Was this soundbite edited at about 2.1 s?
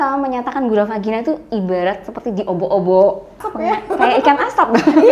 no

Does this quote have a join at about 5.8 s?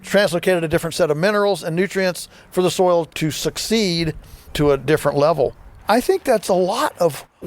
yes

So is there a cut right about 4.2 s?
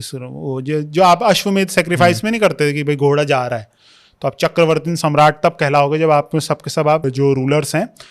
no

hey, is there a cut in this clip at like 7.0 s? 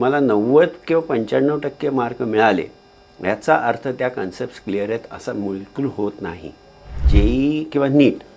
yes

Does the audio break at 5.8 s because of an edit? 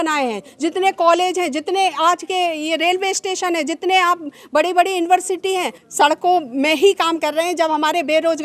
yes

